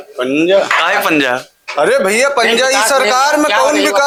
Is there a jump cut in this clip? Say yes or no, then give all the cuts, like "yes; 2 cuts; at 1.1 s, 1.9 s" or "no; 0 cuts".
no; 0 cuts